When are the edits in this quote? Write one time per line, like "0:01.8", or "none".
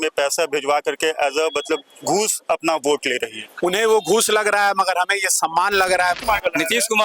0:06.2